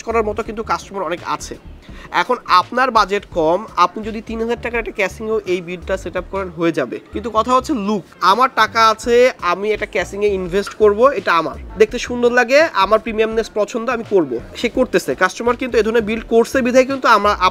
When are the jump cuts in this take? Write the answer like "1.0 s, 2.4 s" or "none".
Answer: 7.0 s, 8.1 s, 11.6 s, 14.4 s